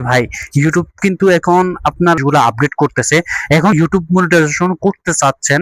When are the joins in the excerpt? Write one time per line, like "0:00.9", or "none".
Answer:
0:02.2
0:03.7